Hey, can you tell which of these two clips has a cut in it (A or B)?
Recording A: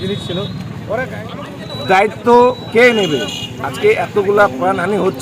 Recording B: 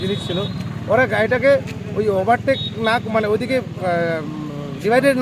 A